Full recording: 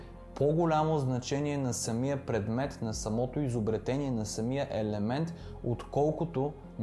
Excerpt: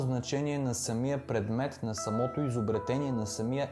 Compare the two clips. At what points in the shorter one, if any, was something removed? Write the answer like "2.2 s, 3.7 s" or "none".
none